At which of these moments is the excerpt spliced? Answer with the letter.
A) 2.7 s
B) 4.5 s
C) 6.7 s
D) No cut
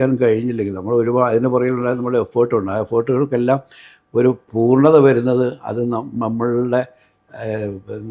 D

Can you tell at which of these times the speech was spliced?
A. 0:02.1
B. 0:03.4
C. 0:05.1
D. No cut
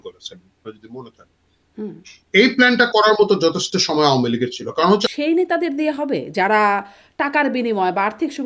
C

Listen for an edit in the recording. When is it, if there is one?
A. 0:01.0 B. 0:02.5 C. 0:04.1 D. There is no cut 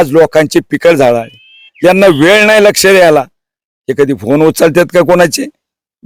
D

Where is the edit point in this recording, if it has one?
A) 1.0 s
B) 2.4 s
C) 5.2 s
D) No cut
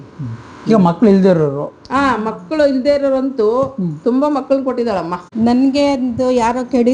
C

